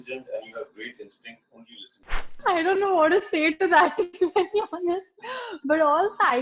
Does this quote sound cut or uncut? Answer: cut